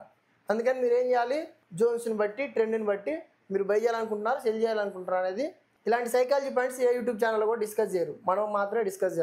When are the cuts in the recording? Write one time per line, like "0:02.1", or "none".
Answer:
0:01.6
0:05.7